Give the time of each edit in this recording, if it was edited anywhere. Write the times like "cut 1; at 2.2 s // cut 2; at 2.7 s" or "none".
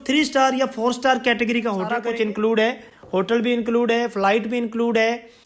cut 1; at 2.0 s